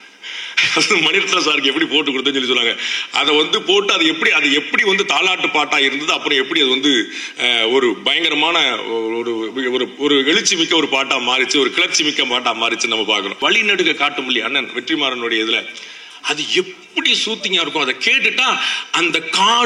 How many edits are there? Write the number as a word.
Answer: one